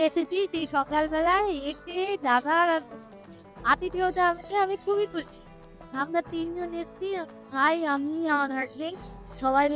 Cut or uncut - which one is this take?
uncut